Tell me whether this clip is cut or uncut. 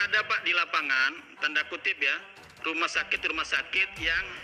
uncut